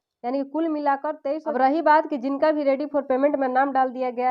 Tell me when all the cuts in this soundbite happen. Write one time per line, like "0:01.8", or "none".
0:01.4